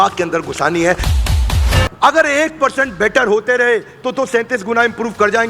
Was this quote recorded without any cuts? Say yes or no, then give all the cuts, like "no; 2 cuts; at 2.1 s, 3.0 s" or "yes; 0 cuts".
no; 1 cut; at 1.4 s